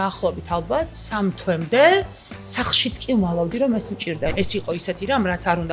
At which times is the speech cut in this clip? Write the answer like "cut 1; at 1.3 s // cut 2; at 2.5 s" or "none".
cut 1; at 4.3 s